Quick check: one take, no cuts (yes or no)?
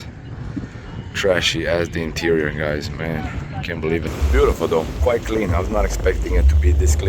no